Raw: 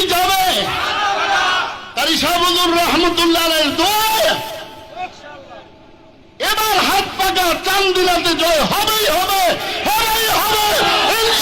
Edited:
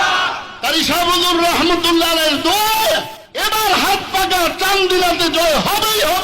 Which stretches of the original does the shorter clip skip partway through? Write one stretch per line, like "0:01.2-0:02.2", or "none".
0:04.6-0:06.3

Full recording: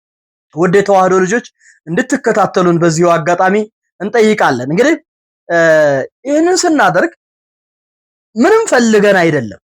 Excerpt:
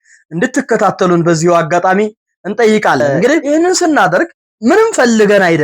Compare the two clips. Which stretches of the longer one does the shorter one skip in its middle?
0:05.0-0:06.3
0:07.3-0:08.2

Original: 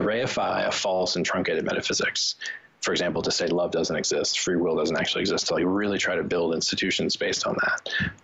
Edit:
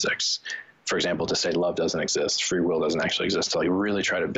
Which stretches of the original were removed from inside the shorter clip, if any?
none

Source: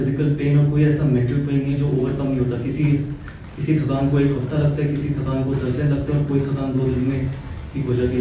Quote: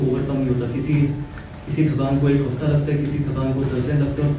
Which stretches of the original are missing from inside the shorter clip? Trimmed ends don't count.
none

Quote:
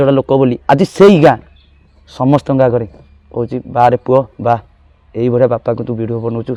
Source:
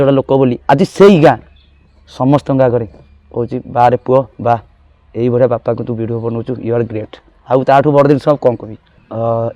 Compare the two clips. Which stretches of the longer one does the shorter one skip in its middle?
none

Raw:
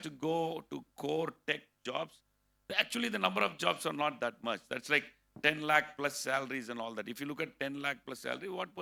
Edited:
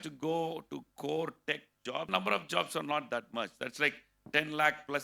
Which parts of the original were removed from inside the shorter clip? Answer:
0:02.1-0:03.2

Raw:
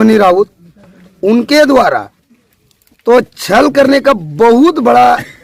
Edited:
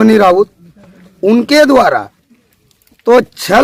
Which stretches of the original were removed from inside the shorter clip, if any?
none

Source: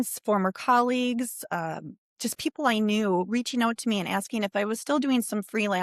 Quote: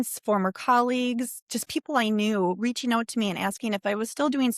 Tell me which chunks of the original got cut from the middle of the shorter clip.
0:01.4-0:02.1

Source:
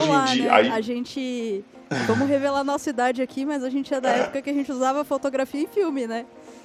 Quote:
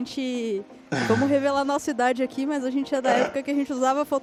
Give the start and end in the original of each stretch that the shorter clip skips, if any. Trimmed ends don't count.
none

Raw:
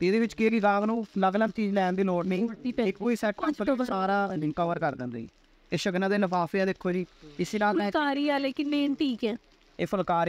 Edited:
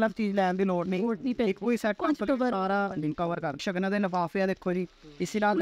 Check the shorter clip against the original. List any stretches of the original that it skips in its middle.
0:04.9-0:05.7

